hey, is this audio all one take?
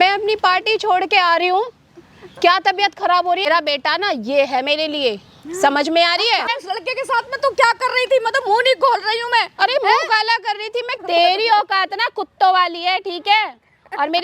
no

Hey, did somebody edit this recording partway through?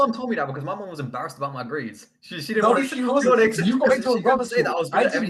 no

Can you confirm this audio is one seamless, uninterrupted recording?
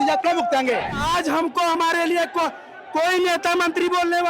no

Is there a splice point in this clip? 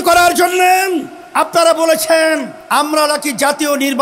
yes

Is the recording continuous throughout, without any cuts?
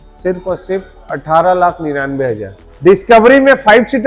no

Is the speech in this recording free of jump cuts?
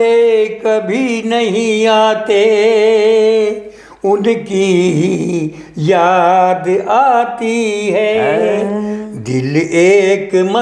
yes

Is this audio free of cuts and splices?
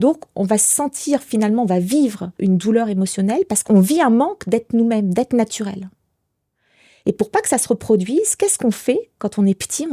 no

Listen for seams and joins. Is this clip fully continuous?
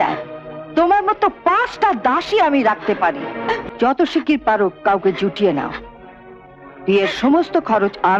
no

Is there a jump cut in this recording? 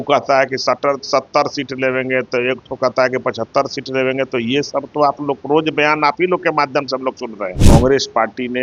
yes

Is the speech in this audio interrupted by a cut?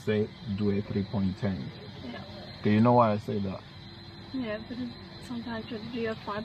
no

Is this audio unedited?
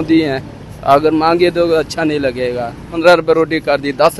no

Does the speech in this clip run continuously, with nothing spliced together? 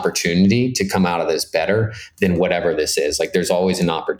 yes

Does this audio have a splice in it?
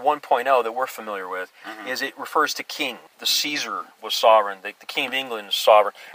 yes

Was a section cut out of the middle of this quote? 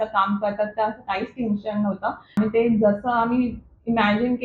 yes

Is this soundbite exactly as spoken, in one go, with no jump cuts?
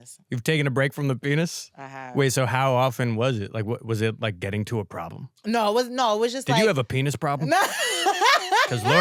yes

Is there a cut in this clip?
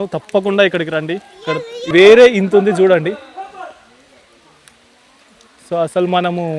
yes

